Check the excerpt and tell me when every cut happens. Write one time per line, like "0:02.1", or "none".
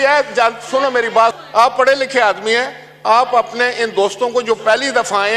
0:01.3